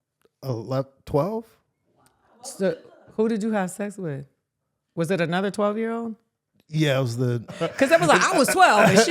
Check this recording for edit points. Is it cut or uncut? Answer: cut